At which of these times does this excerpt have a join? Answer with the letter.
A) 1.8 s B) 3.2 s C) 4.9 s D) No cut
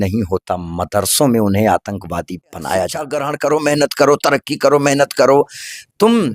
B